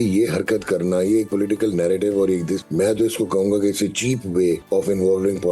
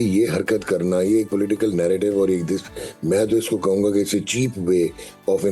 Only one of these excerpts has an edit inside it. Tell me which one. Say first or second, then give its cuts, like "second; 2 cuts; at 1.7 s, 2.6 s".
first; 2 cuts; at 2.6 s, 4.6 s